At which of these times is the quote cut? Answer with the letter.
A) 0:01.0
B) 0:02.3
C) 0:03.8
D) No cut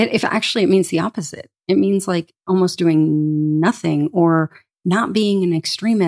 B